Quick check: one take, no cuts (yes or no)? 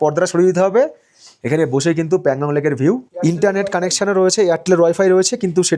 yes